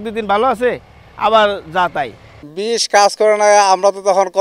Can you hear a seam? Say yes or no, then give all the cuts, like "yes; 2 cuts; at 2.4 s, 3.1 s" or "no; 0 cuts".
no; 0 cuts